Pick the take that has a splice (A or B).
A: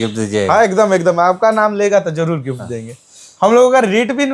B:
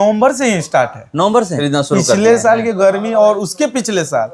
B